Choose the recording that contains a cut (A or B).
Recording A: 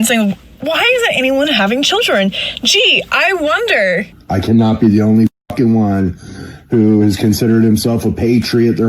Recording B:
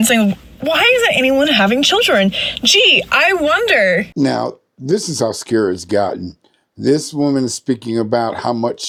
A